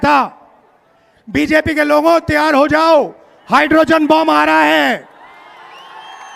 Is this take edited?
no; 0 cuts

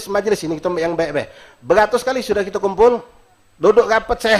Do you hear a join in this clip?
no; 0 cuts

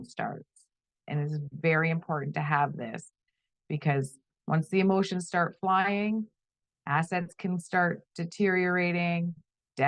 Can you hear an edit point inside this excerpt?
no; 0 cuts

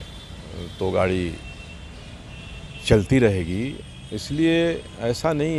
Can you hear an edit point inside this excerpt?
no; 0 cuts

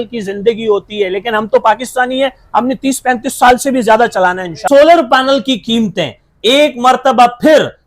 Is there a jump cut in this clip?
yes; 1 cut; at 4.6 s

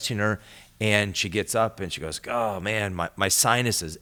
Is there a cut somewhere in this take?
no; 0 cuts

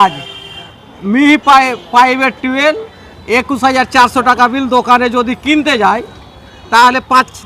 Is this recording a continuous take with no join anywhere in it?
yes; 0 cuts

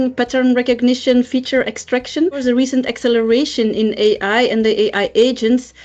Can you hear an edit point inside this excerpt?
yes; 1 cut; at 2.4 s

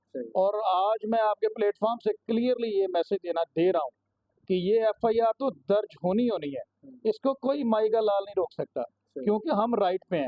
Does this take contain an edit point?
no; 0 cuts

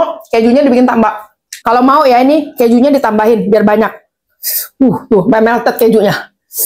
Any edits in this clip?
no; 0 cuts

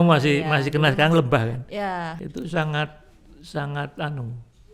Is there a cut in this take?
yes; 1 cut; at 2.1 s

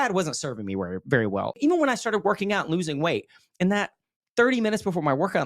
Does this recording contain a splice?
yes; 1 cut; at 1.6 s

